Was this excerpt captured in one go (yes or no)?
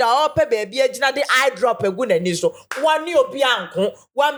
yes